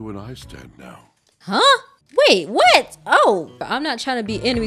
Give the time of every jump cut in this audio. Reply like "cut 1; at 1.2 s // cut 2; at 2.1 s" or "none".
cut 1; at 3.6 s

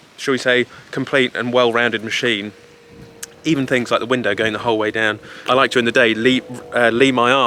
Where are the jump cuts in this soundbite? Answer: none

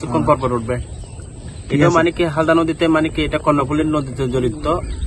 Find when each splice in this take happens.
none

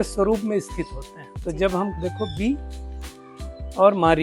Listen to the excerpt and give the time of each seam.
cut 1; at 2.0 s

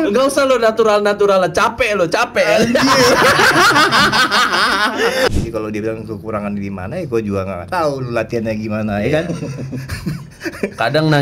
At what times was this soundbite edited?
cut 1; at 5.3 s

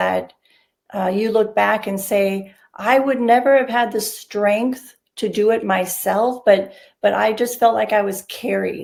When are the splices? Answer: none

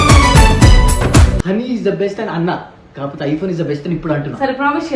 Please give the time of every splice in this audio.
cut 1; at 1.4 s

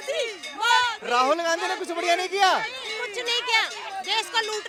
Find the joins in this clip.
none

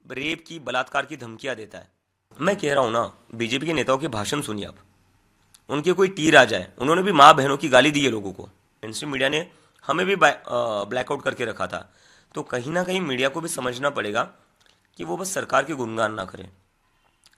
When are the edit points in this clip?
cut 1; at 2.3 s // cut 2; at 8.9 s

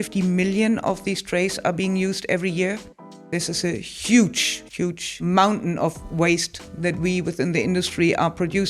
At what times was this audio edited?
cut 1; at 3.2 s // cut 2; at 5.2 s

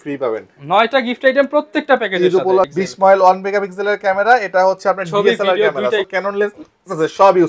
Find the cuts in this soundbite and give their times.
cut 1; at 2.7 s // cut 2; at 6.0 s

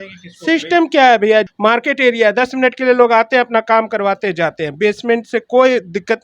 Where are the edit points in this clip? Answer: cut 1; at 1.5 s

